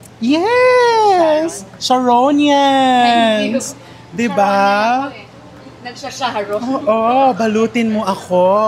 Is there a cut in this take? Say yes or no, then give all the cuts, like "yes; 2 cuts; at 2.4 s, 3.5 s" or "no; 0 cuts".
no; 0 cuts